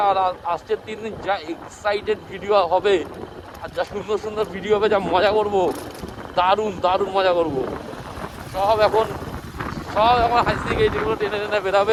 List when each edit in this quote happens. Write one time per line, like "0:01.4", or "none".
none